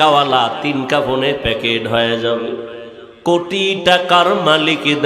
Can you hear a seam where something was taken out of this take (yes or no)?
no